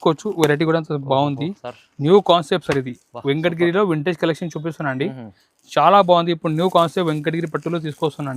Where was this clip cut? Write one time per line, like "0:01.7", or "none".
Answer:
none

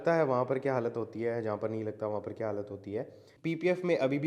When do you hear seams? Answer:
0:03.2

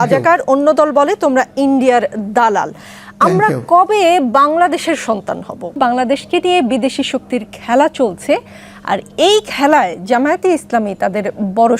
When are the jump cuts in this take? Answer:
0:05.8

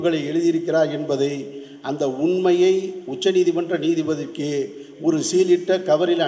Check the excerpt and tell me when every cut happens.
none

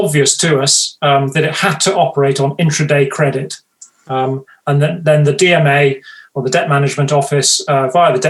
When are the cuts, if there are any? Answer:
none

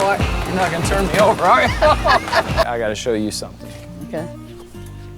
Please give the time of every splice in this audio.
0:02.7

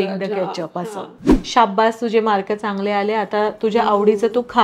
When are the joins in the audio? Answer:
0:01.2

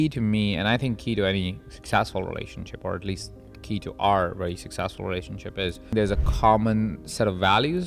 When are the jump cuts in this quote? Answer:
0:05.9

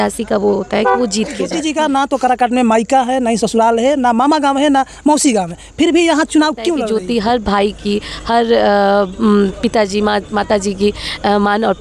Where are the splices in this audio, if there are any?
0:01.5
0:06.8

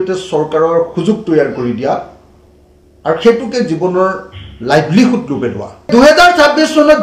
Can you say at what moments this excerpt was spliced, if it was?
0:05.9

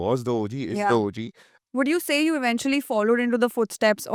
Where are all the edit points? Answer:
none

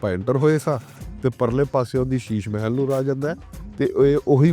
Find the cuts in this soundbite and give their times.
none

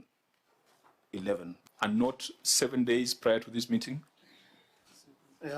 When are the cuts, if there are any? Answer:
0:01.5

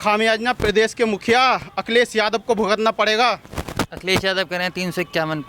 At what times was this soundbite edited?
none

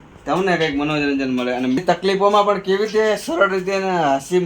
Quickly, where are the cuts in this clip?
0:01.8

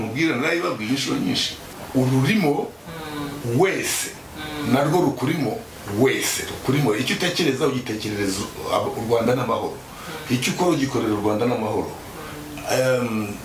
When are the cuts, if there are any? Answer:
0:01.8

